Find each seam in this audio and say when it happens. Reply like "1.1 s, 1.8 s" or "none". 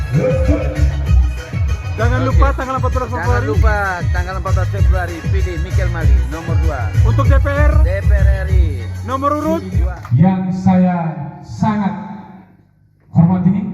9.6 s